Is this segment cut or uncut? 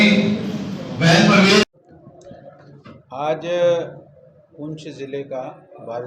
cut